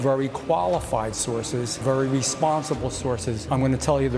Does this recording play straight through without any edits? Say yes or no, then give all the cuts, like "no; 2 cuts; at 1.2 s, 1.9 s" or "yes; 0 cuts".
yes; 0 cuts